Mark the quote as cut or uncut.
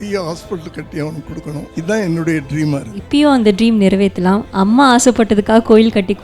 cut